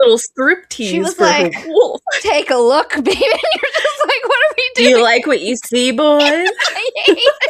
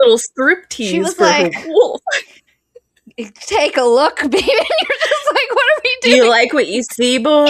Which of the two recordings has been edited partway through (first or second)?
first